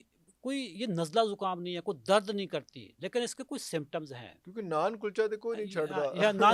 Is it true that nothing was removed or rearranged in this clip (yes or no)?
yes